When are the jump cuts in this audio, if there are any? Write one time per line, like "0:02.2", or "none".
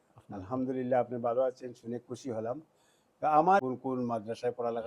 0:03.6